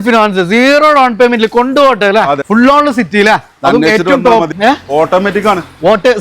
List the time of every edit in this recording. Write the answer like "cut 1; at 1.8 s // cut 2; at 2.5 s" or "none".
cut 1; at 2.4 s // cut 2; at 4.5 s